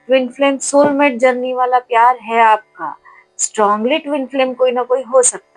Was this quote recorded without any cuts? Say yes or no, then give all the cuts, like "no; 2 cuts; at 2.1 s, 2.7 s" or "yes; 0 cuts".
yes; 0 cuts